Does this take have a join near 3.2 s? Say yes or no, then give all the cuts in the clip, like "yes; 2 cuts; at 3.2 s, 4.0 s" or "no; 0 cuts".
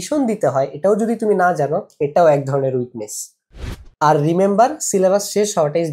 no; 0 cuts